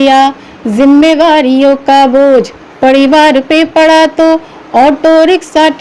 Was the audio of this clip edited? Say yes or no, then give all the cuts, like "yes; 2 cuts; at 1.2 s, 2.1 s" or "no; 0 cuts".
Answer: no; 0 cuts